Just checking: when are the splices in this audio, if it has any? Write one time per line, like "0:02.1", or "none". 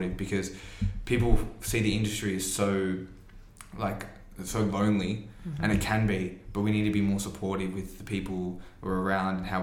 none